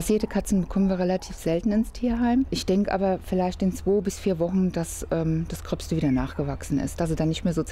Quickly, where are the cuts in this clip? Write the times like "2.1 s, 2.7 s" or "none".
2.6 s